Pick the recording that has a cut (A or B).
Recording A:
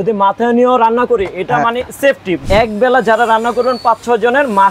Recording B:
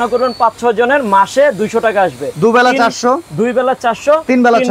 A